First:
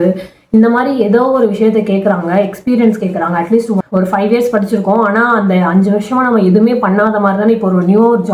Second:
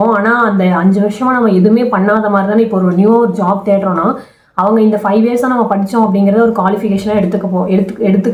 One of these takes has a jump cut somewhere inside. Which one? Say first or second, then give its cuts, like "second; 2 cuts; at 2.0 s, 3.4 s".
first; 1 cut; at 3.8 s